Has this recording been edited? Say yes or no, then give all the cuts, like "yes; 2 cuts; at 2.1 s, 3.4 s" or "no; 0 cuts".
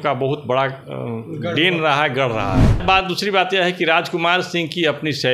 yes; 1 cut; at 2.8 s